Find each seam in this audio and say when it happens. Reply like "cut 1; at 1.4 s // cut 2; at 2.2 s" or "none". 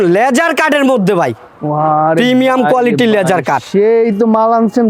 none